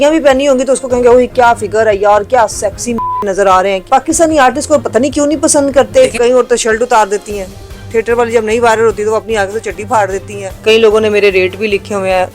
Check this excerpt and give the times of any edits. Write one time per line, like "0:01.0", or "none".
0:03.8
0:06.1
0:10.5